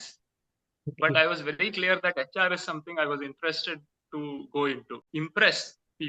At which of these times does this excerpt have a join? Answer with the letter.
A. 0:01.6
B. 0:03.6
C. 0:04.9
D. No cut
C